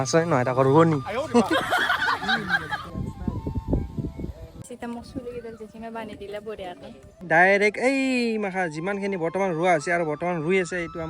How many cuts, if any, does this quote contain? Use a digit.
2